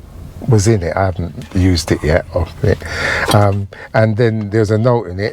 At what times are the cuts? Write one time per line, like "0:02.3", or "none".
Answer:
none